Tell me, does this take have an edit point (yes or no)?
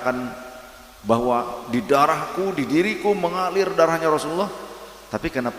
no